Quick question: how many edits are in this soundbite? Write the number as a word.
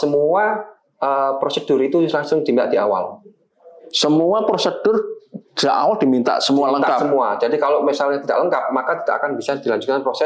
zero